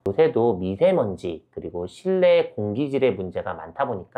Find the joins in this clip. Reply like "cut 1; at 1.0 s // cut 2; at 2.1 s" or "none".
none